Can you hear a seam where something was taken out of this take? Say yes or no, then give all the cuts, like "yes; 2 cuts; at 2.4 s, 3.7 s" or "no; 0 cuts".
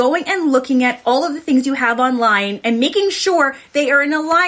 no; 0 cuts